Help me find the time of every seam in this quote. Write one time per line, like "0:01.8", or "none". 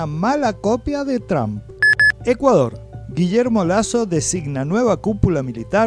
0:01.7